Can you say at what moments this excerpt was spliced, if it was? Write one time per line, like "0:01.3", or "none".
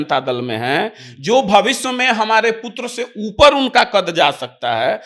none